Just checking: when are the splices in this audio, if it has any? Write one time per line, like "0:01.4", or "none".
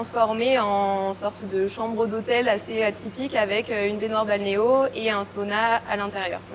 none